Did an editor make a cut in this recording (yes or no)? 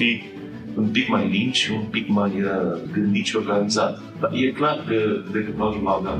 yes